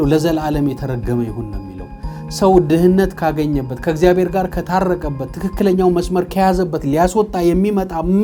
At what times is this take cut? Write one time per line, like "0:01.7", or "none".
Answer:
none